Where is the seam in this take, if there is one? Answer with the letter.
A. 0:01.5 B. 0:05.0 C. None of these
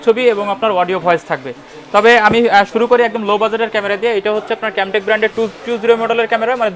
C